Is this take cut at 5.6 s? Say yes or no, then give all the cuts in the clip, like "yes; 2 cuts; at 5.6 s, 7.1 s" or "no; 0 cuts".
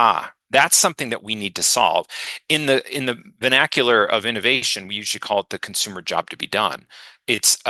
no; 0 cuts